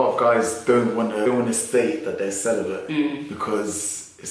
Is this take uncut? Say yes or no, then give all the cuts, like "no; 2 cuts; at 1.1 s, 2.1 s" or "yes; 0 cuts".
yes; 0 cuts